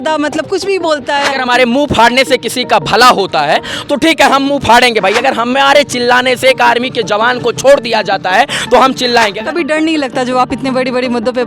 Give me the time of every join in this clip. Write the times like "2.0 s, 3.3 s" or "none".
9.4 s

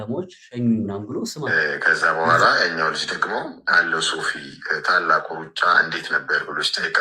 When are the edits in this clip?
1.4 s

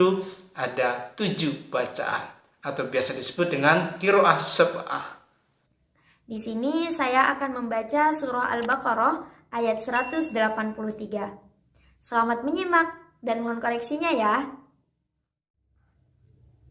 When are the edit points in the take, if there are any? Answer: 5.5 s

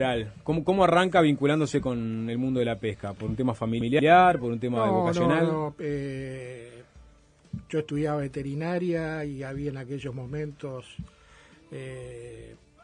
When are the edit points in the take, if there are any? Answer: 7.3 s

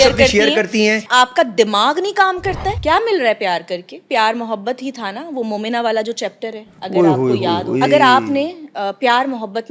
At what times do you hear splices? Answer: 1.1 s, 2.8 s, 4.0 s, 7.8 s

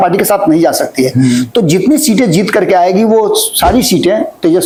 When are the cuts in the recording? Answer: none

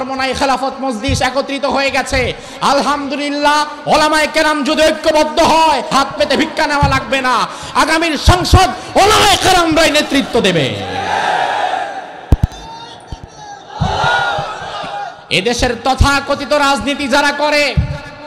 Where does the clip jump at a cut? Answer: 5.9 s, 15.2 s

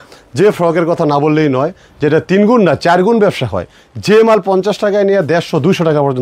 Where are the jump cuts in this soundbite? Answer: none

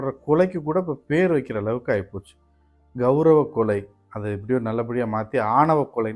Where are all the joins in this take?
none

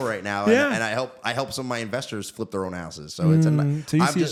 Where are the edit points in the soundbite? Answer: none

